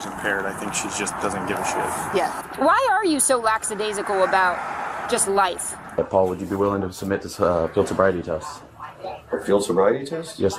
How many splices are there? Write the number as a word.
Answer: two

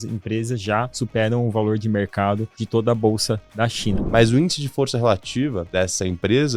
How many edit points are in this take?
four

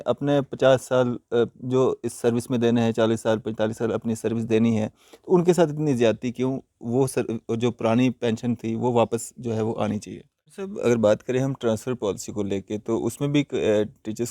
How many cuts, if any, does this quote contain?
one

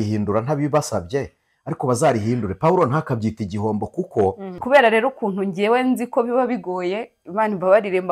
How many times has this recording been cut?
one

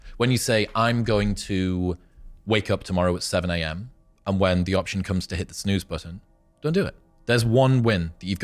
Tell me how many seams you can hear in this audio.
one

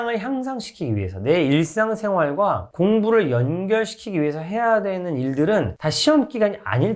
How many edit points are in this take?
zero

